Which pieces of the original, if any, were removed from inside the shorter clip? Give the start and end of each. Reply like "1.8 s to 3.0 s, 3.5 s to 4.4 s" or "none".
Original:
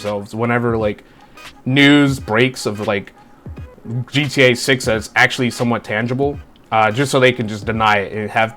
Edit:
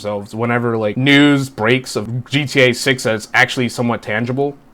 1.0 s to 1.7 s, 2.8 s to 3.9 s